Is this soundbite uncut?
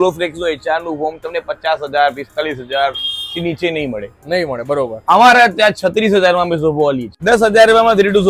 no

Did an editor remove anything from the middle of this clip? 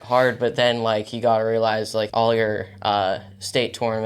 yes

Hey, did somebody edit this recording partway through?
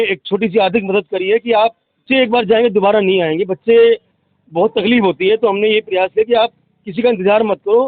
yes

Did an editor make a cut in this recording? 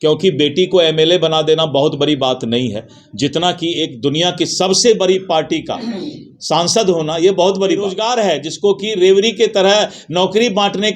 yes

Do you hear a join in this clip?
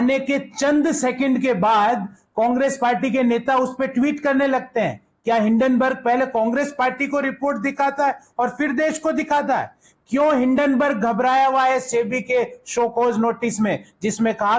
no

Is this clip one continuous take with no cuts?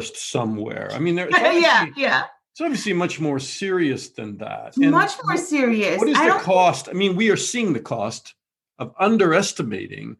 yes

